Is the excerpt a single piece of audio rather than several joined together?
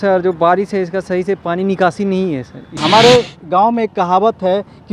no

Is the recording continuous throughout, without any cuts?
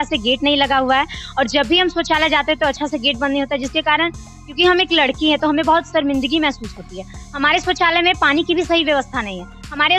yes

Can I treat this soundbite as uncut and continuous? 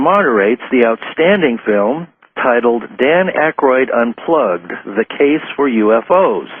no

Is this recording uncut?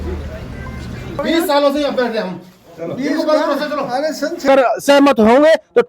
no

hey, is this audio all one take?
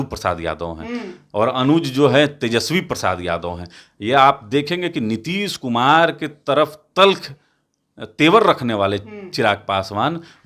yes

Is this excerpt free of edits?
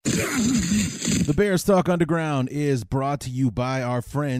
no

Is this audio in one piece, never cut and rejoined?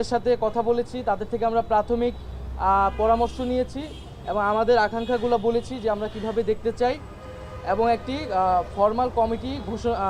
yes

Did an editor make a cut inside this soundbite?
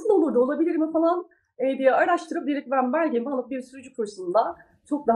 no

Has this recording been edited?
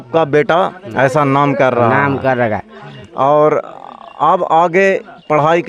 no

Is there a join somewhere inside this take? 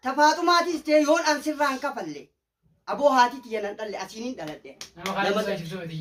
no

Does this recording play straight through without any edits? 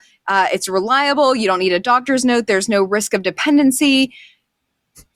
yes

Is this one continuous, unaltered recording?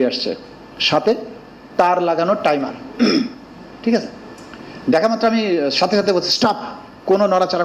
yes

